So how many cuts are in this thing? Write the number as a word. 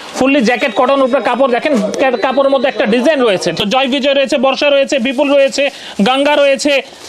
one